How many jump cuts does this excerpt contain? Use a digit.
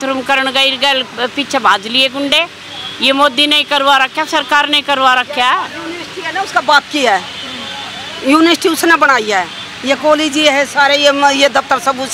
0